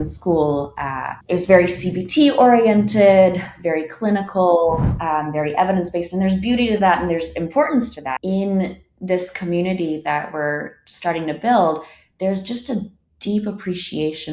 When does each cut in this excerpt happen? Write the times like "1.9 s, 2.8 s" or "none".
1.1 s, 8.1 s